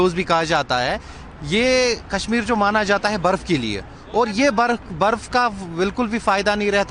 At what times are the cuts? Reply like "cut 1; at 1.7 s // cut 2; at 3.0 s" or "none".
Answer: none